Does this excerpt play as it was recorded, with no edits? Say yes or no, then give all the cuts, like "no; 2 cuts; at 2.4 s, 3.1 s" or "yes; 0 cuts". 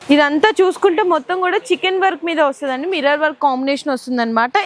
yes; 0 cuts